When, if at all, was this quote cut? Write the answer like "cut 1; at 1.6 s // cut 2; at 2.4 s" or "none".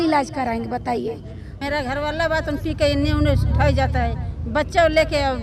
cut 1; at 1.6 s